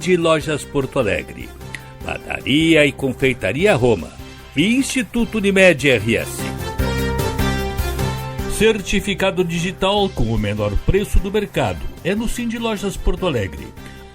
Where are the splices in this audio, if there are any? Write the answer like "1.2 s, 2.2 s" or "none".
6.3 s, 8.3 s